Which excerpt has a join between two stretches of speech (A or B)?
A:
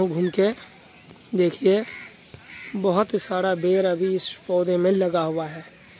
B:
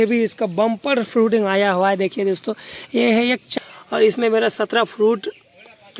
B